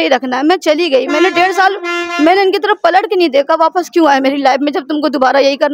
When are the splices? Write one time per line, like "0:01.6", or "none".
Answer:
none